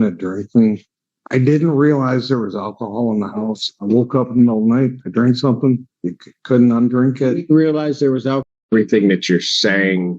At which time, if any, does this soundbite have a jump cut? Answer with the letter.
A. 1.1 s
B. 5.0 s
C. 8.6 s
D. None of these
C